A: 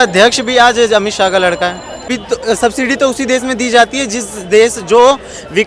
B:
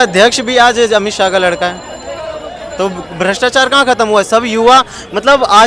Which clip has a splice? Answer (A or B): A